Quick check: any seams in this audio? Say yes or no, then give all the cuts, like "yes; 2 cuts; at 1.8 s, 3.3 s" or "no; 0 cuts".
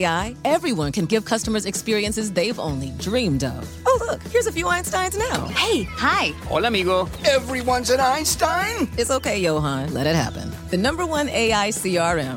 no; 0 cuts